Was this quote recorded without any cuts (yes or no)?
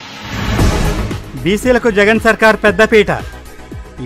no